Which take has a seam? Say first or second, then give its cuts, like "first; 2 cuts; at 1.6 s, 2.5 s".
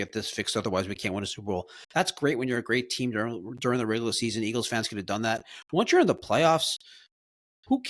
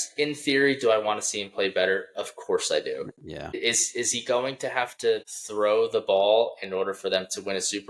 second; 2 cuts; at 3.6 s, 5.4 s